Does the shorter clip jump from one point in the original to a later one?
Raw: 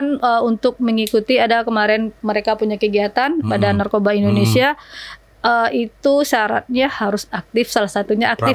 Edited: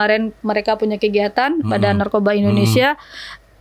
no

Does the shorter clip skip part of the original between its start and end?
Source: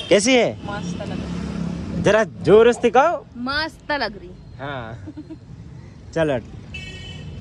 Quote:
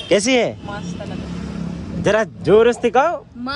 no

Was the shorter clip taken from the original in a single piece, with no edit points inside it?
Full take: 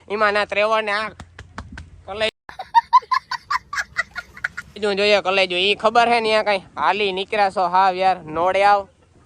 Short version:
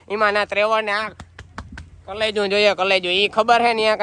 no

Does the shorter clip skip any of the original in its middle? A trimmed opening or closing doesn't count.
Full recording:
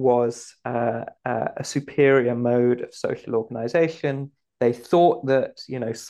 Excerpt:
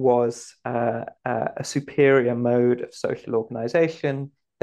no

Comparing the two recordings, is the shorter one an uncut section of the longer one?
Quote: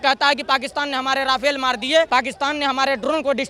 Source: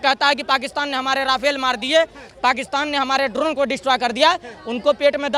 no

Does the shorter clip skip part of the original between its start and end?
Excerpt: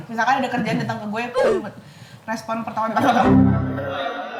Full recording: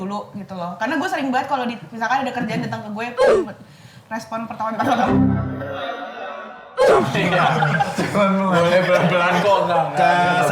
no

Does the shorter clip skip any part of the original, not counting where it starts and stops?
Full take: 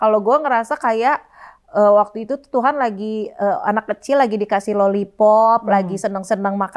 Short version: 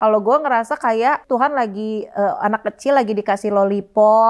yes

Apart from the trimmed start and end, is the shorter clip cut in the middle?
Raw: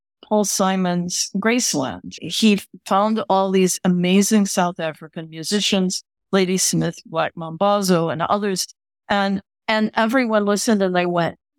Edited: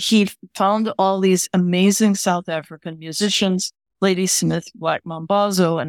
no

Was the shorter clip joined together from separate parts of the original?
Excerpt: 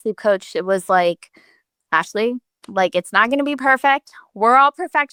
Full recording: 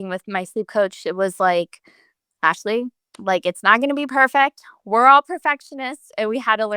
no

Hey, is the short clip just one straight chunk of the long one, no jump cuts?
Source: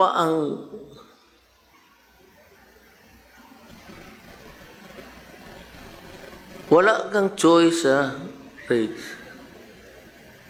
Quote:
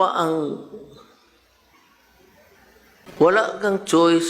no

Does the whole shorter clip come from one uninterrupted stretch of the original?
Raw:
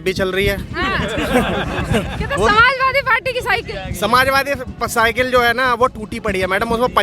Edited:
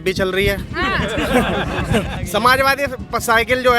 no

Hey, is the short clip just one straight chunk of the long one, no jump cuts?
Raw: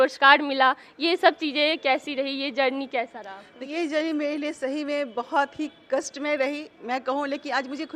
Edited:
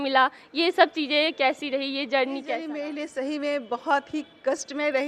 no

